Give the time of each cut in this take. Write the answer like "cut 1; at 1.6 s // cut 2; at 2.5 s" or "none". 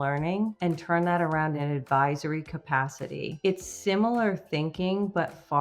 cut 1; at 1.6 s // cut 2; at 3.3 s